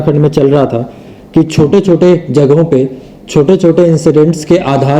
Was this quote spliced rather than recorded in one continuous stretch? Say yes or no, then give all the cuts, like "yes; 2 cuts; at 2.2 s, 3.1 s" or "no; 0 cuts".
no; 0 cuts